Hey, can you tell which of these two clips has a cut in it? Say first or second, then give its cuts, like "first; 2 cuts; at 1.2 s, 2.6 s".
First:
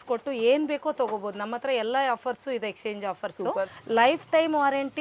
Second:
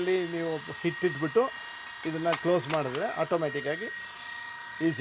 first; 1 cut; at 3.8 s